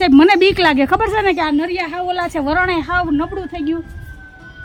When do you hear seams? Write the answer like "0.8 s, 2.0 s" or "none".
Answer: none